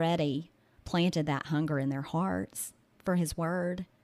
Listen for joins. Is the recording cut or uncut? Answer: uncut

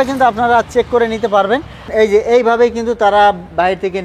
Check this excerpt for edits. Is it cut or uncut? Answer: cut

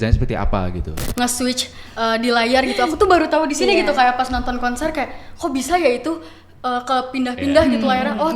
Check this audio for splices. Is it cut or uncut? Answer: cut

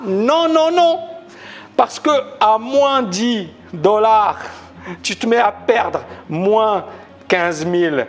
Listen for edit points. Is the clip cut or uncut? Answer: uncut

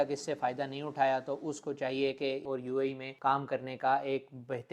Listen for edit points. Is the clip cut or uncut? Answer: cut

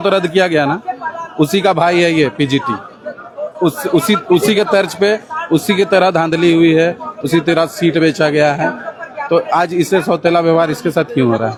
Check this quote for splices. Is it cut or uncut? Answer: uncut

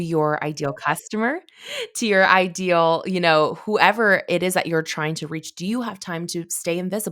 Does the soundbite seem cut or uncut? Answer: uncut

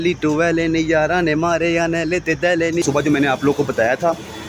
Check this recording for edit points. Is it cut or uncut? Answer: cut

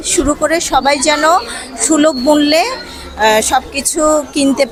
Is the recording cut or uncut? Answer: uncut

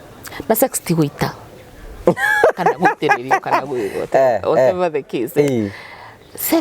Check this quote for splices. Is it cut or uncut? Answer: uncut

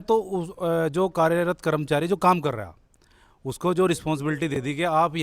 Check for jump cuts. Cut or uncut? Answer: uncut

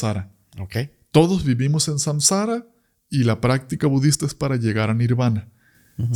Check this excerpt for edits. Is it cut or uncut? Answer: uncut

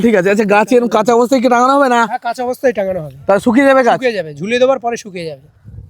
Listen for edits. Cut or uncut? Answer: uncut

